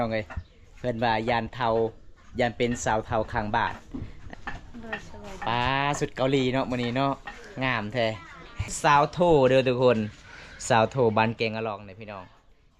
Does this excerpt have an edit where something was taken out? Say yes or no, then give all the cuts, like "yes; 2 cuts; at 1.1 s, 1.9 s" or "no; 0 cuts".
yes; 2 cuts; at 4.2 s, 8.6 s